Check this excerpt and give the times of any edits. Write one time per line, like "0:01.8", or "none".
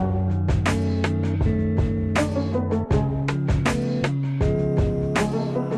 0:02.8